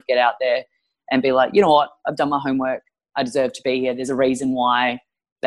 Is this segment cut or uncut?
uncut